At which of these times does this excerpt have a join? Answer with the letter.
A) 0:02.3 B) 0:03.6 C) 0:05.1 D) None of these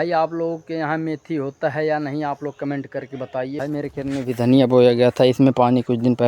B